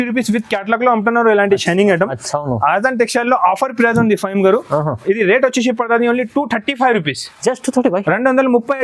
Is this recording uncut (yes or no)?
yes